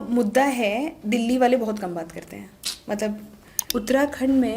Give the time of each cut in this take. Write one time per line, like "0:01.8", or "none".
0:03.7